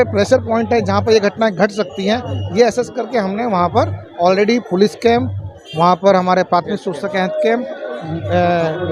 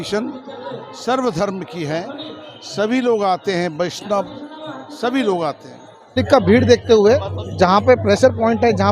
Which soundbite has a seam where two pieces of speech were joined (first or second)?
second